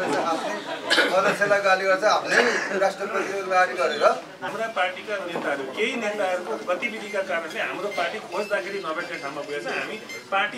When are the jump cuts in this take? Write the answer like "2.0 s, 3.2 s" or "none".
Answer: 4.5 s

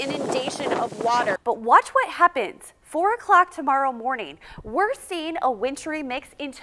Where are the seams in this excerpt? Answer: 1.4 s

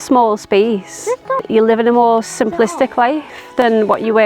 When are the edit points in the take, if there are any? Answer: 1.4 s

